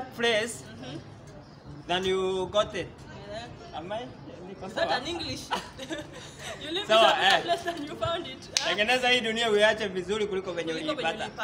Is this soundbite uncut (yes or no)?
yes